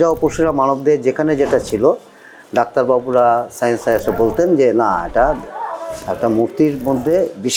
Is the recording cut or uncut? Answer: uncut